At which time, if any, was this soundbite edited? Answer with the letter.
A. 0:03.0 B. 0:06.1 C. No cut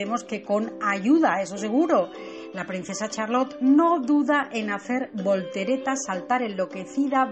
B